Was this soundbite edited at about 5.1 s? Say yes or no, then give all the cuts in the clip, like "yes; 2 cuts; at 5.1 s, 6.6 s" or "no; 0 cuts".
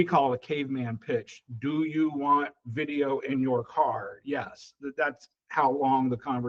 no; 0 cuts